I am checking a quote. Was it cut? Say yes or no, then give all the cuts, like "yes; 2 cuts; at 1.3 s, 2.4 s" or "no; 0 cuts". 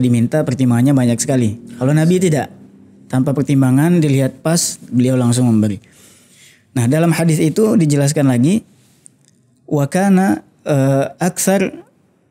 no; 0 cuts